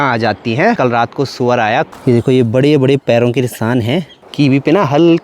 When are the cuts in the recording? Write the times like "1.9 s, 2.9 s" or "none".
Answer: 0.8 s, 1.9 s, 4.2 s